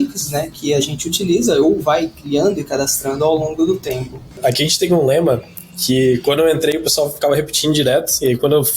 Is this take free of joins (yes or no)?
no